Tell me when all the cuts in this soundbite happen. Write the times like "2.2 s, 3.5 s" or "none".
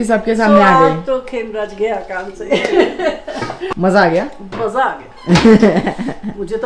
3.8 s